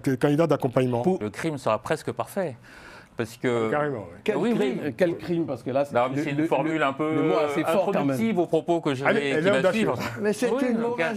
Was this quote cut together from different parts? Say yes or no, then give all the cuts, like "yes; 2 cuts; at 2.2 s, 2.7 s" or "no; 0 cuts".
yes; 1 cut; at 1.2 s